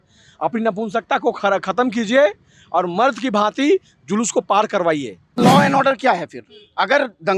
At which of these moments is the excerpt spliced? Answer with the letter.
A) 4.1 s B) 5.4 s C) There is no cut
B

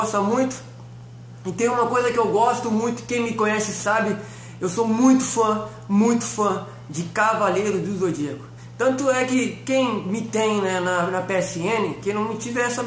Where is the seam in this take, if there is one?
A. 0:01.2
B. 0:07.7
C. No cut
C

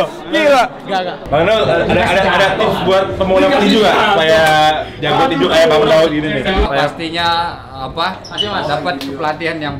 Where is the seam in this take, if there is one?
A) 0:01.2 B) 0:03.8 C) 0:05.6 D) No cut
A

